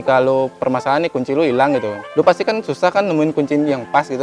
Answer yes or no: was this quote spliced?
yes